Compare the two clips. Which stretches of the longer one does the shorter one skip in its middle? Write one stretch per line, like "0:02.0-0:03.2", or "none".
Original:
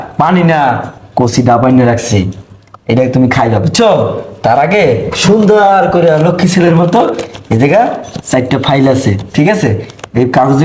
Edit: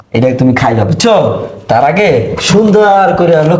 none

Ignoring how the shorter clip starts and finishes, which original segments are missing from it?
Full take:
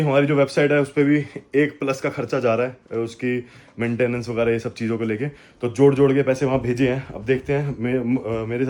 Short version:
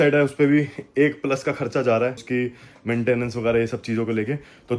0:02.8-0:03.1

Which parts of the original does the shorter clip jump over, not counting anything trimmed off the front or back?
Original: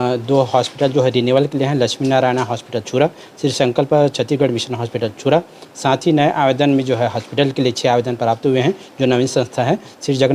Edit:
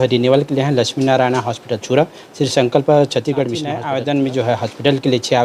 0:04.8-0:06.3

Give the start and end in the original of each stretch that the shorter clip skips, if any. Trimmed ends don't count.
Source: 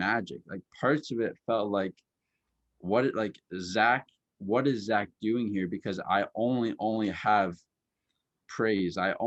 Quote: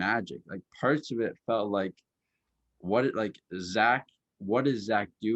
none

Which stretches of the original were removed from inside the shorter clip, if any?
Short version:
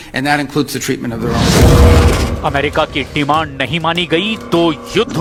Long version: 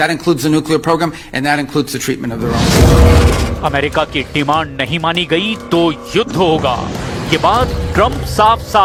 none

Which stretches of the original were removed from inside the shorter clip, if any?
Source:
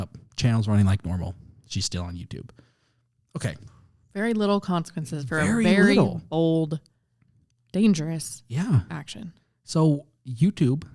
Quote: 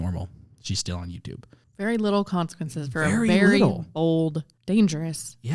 0:02.6-0:03.9
0:06.9-0:07.6

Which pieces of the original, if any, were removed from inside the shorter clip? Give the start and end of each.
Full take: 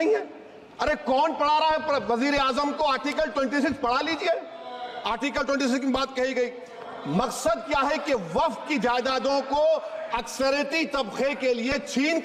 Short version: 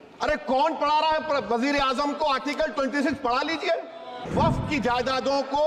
0:04.9-0:08.3

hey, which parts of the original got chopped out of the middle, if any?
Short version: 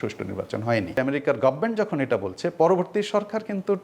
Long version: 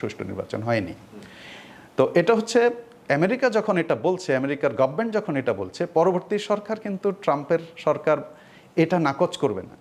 0:01.0-0:04.3

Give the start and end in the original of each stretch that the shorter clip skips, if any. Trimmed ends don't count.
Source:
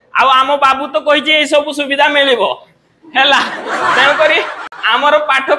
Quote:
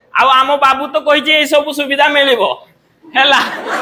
none

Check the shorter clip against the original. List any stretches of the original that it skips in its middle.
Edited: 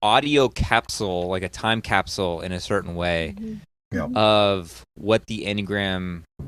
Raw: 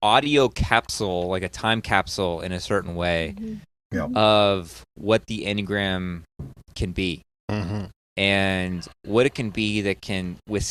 none

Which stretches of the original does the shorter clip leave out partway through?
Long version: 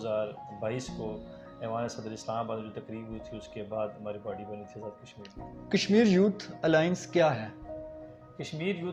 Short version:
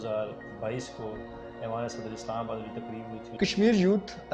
0:03.3-0:05.6

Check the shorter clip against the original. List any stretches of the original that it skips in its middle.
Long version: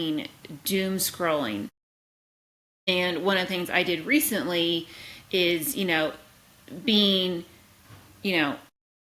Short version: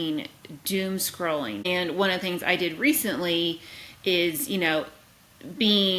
0:01.7-0:02.9

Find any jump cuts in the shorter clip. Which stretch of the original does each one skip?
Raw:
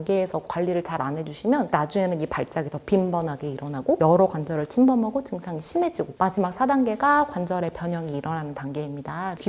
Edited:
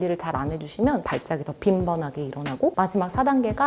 0:01.7-0:02.3
0:04.0-0:06.1

